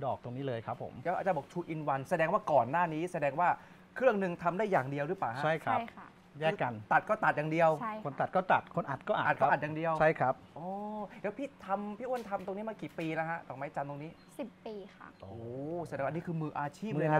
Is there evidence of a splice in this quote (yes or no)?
no